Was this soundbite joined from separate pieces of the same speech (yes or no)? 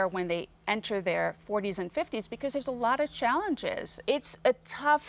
yes